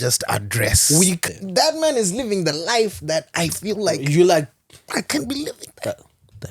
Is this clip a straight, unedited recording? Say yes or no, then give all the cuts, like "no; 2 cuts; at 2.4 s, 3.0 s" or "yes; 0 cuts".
no; 1 cut; at 1.2 s